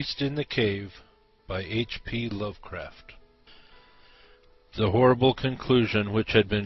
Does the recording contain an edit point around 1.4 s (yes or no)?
no